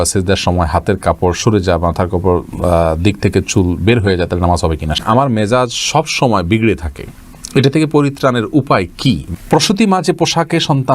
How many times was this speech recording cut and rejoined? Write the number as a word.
two